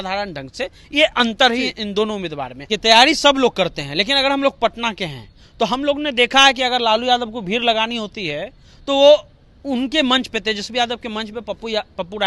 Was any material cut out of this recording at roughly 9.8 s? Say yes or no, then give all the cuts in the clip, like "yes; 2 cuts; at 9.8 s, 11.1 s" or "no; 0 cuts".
no; 1 cut; at 2.8 s